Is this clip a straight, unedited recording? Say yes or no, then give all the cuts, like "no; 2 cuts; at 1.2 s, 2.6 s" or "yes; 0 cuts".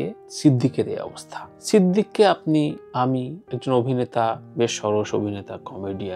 yes; 0 cuts